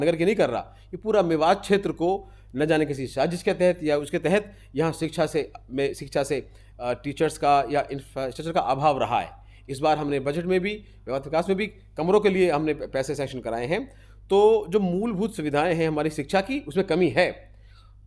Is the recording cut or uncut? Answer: uncut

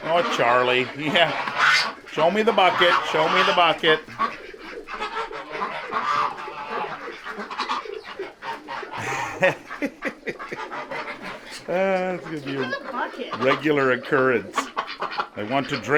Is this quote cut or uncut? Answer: uncut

